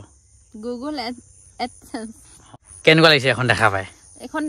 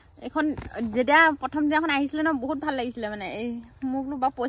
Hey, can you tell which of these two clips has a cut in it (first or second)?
first